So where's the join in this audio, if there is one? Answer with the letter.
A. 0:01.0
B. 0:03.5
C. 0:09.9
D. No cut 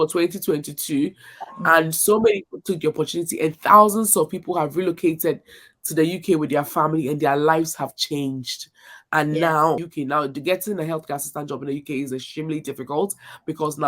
C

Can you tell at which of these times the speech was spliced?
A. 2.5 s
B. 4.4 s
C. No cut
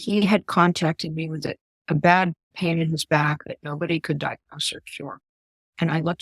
A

